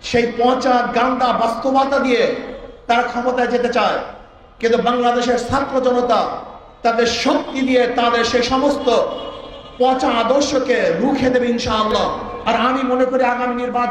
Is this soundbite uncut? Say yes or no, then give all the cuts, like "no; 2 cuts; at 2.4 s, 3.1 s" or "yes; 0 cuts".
no; 1 cut; at 12.3 s